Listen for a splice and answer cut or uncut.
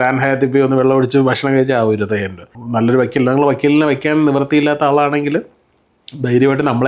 cut